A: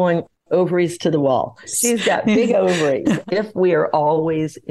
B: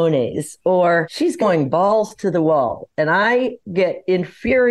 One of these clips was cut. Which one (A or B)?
A